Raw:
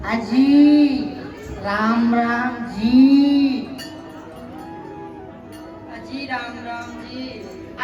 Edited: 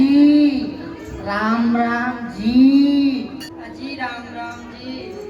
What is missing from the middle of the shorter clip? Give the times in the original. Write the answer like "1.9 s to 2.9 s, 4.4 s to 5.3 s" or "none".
3.9 s to 5.8 s